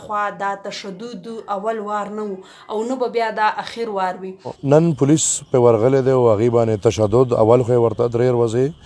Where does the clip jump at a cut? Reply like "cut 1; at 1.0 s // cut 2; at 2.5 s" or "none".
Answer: cut 1; at 4.6 s